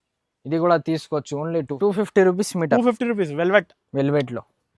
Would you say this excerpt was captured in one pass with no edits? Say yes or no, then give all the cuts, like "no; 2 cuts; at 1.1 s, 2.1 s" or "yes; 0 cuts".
no; 1 cut; at 1.7 s